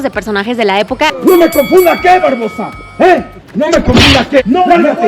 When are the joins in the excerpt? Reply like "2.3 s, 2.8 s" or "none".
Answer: 1.1 s